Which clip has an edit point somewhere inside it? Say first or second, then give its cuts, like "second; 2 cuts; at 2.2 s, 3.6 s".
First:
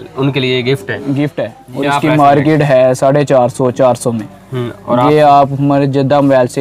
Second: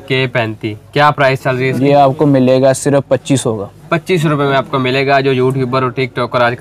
first; 1 cut; at 1.6 s